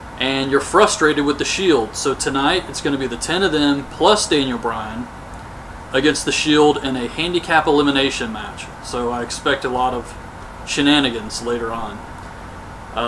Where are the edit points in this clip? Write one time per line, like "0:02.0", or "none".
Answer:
0:05.5